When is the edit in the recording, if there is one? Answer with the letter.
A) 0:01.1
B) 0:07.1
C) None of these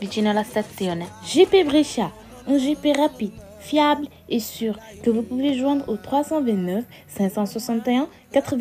A